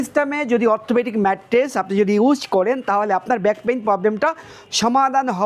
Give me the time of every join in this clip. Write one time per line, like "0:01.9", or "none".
none